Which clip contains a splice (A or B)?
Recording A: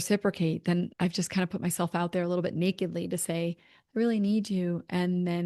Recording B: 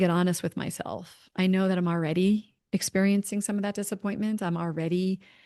A